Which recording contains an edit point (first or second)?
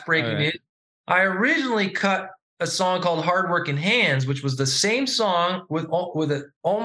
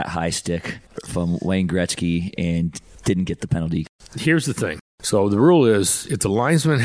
second